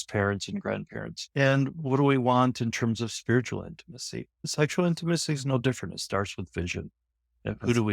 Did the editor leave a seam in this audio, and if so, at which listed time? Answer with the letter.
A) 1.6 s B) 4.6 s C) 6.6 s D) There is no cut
A